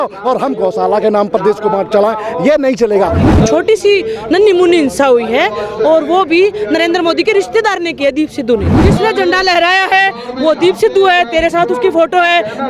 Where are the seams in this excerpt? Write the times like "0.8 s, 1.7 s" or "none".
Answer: 3.3 s, 8.7 s